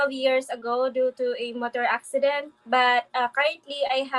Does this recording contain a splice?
no; 0 cuts

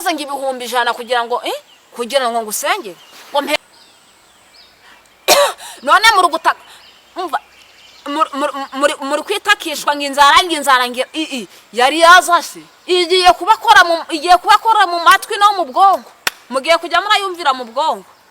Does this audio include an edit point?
yes; 1 cut; at 3.6 s

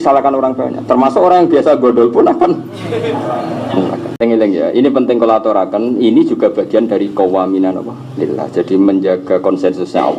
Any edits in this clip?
yes; 1 cut; at 4.2 s

